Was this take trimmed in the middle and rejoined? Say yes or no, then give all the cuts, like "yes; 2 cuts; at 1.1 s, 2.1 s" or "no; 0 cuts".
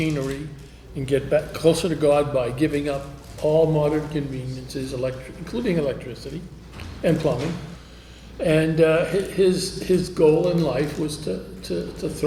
no; 0 cuts